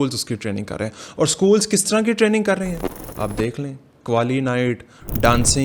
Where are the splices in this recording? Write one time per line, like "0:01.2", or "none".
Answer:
none

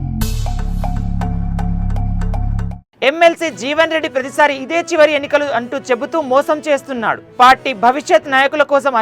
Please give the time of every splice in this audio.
0:02.4

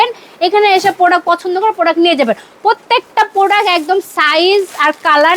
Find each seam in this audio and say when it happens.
none

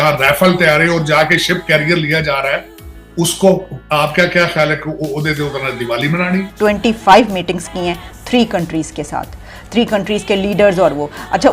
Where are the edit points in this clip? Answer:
0:06.5
0:09.6

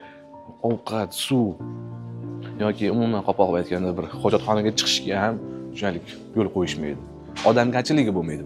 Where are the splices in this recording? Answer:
none

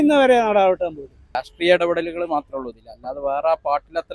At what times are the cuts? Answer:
0:01.5

